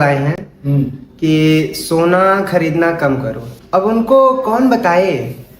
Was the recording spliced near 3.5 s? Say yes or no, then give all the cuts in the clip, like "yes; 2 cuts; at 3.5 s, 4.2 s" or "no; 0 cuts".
yes; 1 cut; at 3.5 s